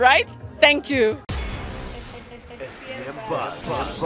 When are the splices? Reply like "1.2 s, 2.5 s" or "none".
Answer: 1.2 s